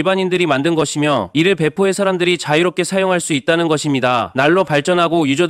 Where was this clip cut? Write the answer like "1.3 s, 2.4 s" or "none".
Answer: 1.3 s, 4.3 s